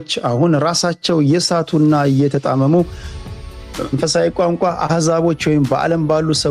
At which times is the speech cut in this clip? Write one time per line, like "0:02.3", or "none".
none